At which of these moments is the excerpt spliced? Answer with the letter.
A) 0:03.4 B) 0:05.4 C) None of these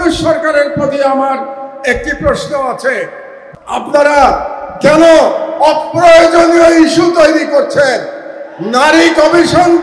A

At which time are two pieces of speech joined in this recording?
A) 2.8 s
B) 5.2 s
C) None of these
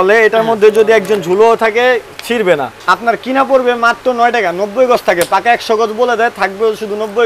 A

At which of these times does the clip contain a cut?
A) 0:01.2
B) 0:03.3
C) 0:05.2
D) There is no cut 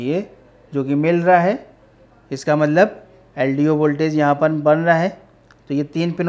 D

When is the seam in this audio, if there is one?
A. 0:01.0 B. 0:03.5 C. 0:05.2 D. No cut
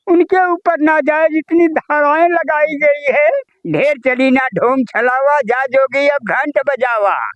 B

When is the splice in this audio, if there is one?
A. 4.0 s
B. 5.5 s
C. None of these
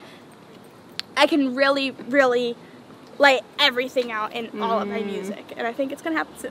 C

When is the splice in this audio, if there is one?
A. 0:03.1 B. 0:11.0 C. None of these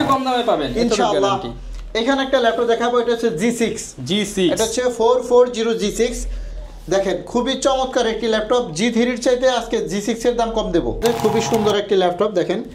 B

